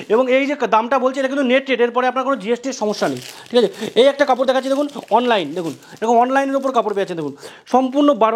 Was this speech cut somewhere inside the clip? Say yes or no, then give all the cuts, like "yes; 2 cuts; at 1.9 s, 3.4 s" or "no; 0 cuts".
no; 0 cuts